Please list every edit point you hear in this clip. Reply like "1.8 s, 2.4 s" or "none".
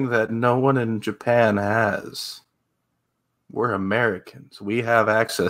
none